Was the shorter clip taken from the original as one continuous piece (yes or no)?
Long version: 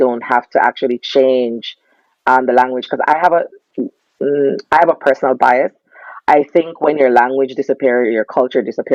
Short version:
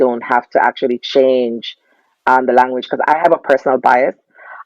no